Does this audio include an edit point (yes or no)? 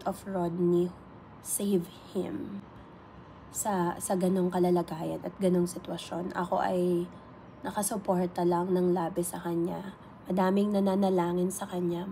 no